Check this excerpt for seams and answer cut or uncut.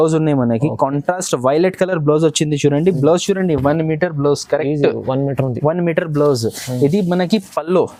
uncut